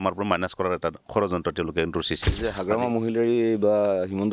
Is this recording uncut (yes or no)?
no